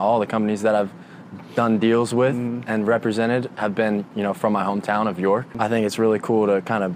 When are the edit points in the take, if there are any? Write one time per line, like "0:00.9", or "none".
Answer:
0:05.5